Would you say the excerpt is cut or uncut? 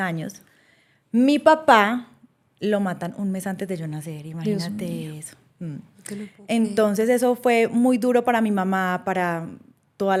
uncut